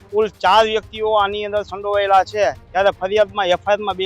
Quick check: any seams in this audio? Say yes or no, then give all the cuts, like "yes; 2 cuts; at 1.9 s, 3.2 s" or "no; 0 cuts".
no; 0 cuts